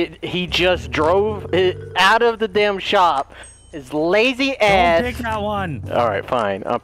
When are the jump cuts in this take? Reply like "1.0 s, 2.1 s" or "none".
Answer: 5.8 s